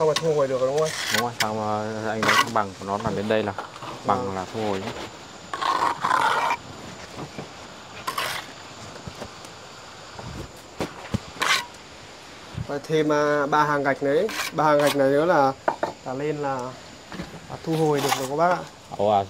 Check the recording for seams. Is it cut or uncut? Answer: uncut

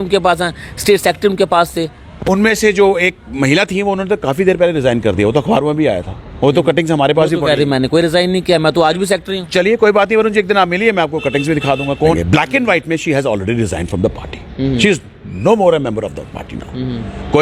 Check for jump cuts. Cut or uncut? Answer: cut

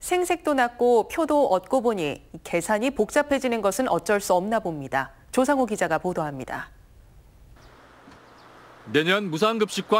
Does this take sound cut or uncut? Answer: uncut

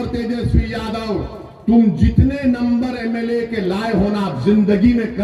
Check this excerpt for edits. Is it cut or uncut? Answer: uncut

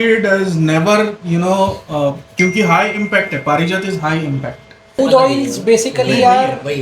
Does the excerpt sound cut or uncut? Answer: cut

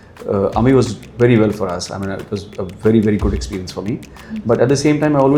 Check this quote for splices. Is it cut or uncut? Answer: uncut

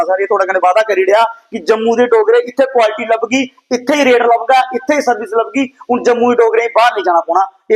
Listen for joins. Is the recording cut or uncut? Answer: uncut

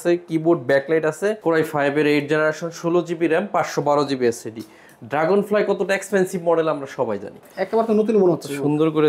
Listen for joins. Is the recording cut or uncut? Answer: cut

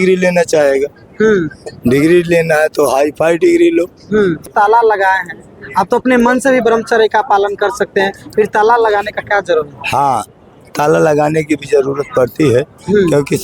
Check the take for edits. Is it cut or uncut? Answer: cut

